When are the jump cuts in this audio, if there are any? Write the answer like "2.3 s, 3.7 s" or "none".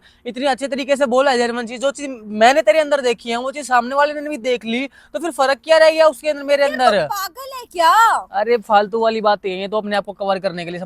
none

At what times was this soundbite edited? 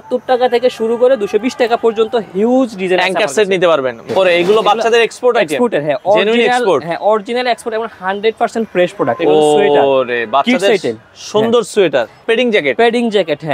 4.0 s, 12.2 s

